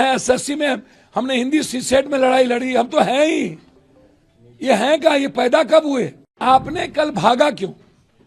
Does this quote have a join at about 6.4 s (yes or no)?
yes